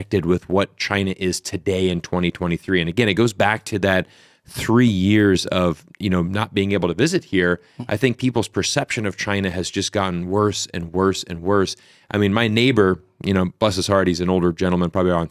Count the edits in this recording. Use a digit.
0